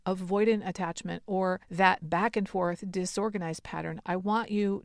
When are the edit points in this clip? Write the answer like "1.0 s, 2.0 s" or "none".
1.7 s

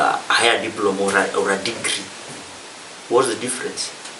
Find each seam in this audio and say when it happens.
none

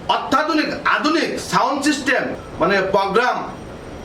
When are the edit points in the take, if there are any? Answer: 2.4 s

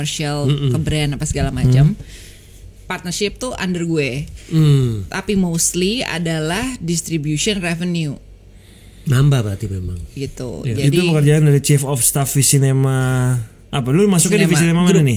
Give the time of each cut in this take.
none

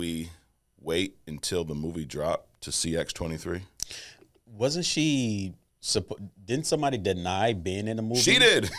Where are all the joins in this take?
none

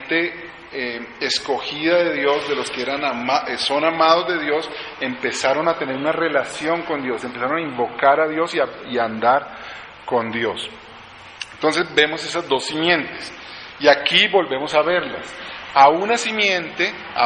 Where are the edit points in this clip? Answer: none

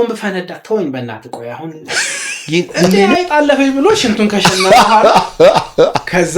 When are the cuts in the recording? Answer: 3.1 s

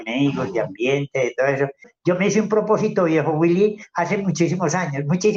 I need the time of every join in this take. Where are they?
1.9 s

